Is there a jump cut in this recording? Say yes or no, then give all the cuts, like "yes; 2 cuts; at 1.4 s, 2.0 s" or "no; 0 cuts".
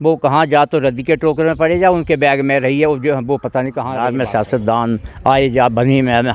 yes; 1 cut; at 3.9 s